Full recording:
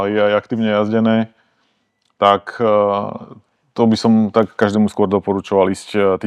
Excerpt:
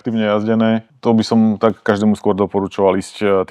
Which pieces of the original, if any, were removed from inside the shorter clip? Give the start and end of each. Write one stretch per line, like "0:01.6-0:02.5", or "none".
0:01.4-0:03.6